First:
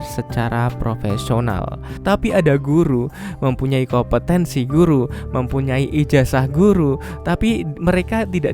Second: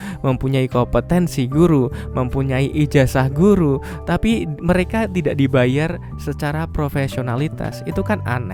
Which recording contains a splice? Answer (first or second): first